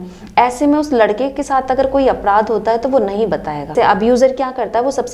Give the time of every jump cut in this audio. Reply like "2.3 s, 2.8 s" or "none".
3.7 s

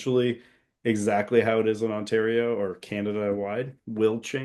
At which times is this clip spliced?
none

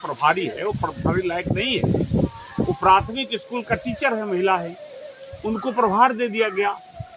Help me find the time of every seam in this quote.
none

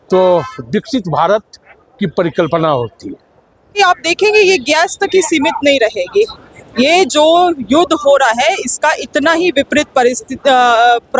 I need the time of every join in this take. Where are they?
3.8 s

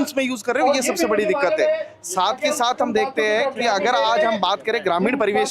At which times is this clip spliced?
none

